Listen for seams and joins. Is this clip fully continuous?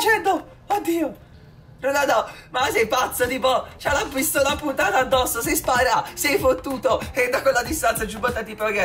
yes; 0 cuts

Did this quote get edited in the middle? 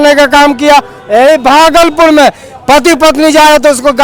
no; 0 cuts

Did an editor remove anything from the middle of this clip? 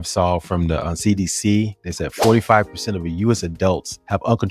no; 0 cuts

